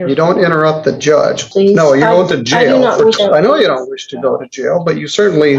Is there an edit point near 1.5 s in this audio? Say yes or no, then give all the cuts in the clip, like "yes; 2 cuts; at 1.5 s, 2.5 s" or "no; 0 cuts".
yes; 2 cuts; at 1.5 s, 3.2 s